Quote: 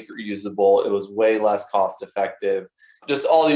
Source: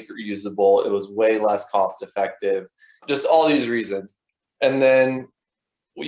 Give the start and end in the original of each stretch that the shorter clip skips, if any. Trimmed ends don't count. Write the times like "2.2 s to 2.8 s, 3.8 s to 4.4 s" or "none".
none